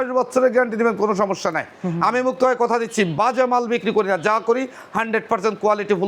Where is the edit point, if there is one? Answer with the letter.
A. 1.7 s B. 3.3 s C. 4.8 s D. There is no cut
D